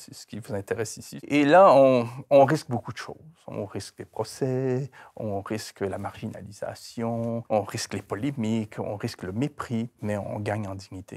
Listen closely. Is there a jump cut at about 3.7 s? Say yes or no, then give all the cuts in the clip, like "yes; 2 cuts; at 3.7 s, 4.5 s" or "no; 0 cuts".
no; 3 cuts; at 1.1 s, 7.4 s, 9.9 s